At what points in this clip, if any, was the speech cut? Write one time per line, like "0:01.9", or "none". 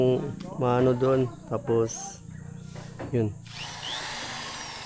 none